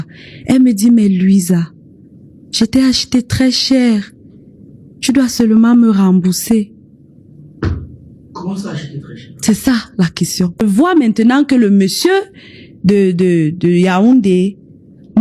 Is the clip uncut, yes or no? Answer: no